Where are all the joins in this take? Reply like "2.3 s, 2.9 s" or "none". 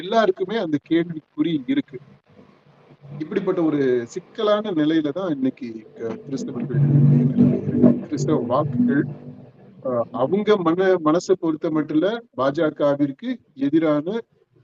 none